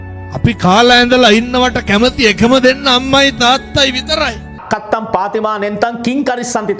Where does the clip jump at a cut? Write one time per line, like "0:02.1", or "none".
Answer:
0:04.6